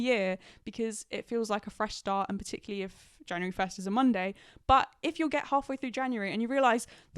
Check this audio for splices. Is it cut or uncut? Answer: uncut